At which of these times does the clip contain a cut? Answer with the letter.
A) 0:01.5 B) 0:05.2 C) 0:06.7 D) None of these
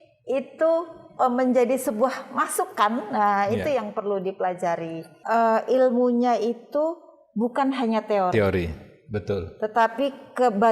B